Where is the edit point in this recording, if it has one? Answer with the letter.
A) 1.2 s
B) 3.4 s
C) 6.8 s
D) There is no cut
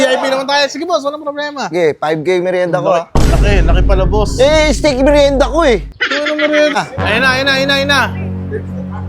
C